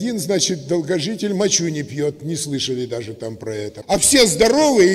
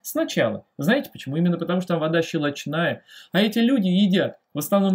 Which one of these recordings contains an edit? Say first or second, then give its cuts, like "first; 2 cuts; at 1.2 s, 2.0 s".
first; 1 cut; at 3.8 s